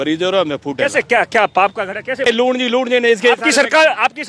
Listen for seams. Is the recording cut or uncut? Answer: cut